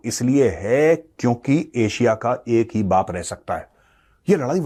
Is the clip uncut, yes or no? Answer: yes